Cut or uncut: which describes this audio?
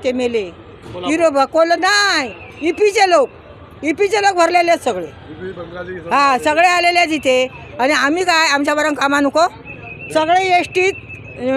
uncut